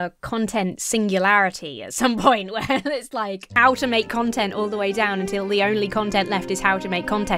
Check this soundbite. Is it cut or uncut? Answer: cut